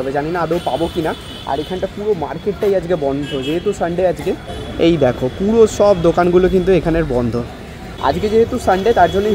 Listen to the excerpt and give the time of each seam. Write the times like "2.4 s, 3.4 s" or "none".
none